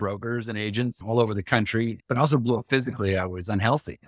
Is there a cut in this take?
yes; 2 cuts; at 1.0 s, 2.0 s

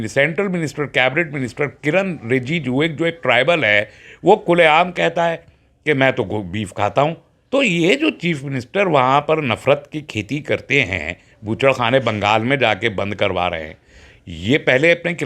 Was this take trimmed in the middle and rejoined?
yes; 1 cut; at 7.3 s

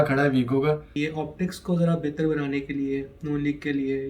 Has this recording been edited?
yes; 1 cut; at 0.9 s

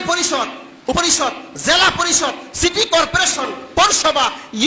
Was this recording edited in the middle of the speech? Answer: yes; 1 cut; at 1.0 s

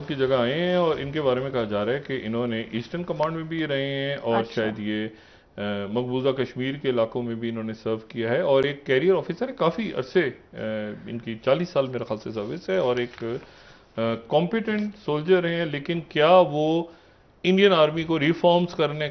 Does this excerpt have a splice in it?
no; 0 cuts

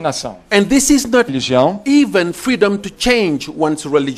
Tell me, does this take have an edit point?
no; 0 cuts

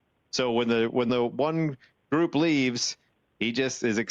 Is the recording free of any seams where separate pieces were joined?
no; 1 cut; at 1.1 s

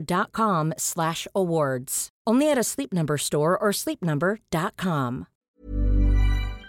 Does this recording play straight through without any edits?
no; 1 cut; at 5.6 s

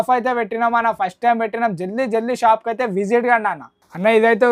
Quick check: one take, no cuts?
yes; 0 cuts

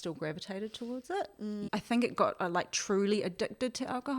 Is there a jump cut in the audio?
yes; 1 cut; at 1.6 s

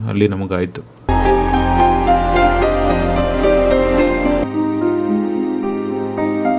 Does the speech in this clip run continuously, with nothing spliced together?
no; 2 cuts; at 1.1 s, 4.4 s

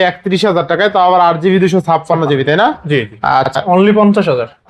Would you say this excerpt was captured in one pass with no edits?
no; 1 cut; at 3.6 s

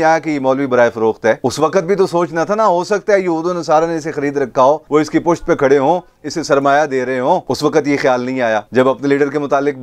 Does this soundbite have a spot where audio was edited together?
no; 0 cuts

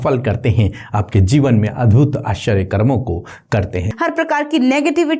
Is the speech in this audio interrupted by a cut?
yes; 1 cut; at 3.9 s

